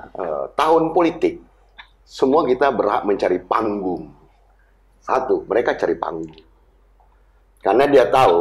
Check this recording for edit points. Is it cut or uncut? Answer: uncut